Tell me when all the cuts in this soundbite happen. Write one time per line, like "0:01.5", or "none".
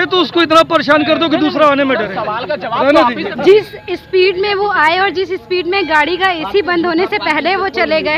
0:03.3